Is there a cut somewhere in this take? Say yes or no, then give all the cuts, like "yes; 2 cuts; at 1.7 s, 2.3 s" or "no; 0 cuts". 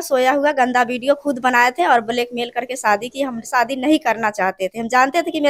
no; 0 cuts